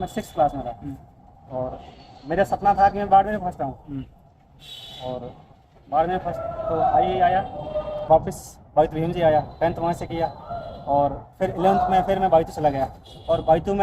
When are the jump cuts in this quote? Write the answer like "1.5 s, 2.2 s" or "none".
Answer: 8.1 s